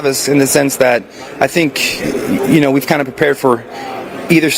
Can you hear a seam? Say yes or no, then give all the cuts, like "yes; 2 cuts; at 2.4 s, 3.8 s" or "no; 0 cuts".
no; 0 cuts